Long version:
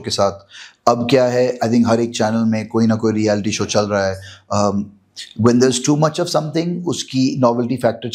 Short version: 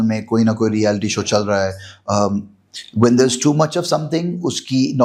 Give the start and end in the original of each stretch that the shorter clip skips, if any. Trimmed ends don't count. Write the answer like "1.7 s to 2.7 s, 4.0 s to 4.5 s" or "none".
none